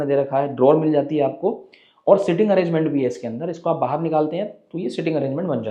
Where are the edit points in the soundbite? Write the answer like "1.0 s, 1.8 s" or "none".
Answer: none